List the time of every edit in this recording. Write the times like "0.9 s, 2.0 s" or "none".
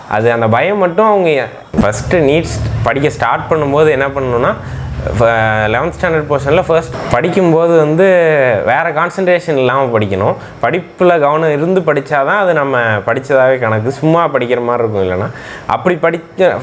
1.8 s, 6.9 s